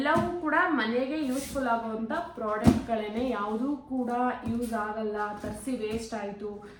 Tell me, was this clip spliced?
no; 0 cuts

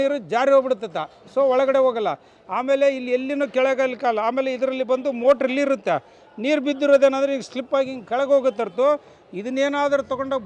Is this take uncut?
yes; 0 cuts

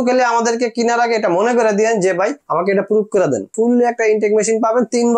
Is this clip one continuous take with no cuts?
no; 1 cut; at 3.5 s

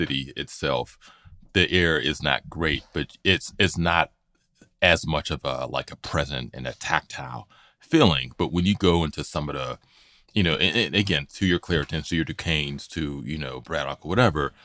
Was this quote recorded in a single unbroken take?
yes; 0 cuts

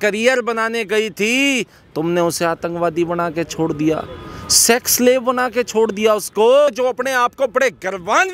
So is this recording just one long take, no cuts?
no; 1 cut; at 6.7 s

